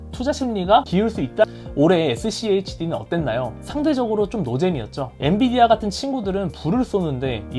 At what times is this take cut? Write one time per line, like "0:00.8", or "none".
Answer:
0:01.4